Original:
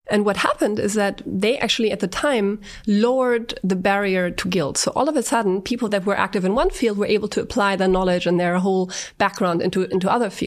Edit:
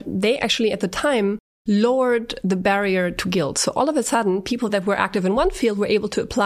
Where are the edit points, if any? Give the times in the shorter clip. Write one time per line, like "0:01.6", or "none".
none